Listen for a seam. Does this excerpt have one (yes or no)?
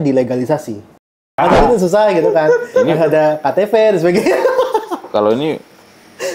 yes